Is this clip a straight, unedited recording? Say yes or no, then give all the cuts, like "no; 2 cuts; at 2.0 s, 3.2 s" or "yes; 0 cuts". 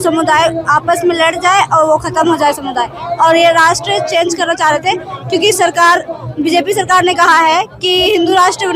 yes; 0 cuts